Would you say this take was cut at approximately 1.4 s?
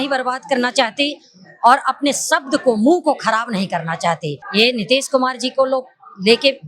no; 1 cut; at 4.4 s

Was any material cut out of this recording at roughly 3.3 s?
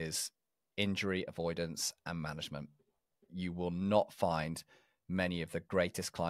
yes; 1 cut; at 3.3 s

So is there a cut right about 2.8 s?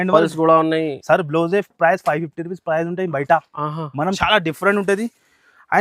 no; 1 cut; at 4.2 s

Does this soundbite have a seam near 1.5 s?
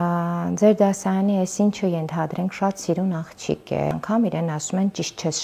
no; 1 cut; at 3.9 s

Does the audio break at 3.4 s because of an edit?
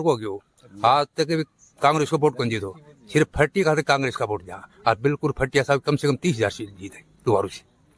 no; 0 cuts

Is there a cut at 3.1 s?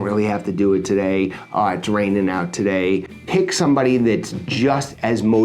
yes; 1 cut; at 3.1 s

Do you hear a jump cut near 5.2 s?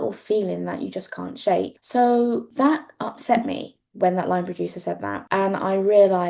yes; 3 cuts; at 1.8 s, 2.5 s, 5.2 s

